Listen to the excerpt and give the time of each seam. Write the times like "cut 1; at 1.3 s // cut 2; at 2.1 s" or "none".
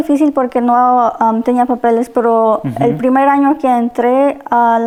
none